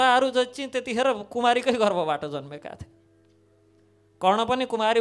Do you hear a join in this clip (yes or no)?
no